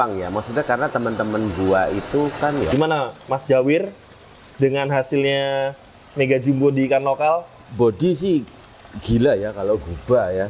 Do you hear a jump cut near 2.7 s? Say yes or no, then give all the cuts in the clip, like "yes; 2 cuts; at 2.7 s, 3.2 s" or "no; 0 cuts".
yes; 1 cut; at 2.7 s